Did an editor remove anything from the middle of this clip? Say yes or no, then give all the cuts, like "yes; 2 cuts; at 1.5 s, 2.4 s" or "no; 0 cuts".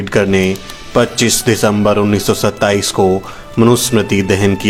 no; 0 cuts